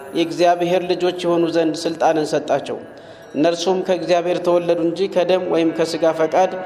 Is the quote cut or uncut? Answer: uncut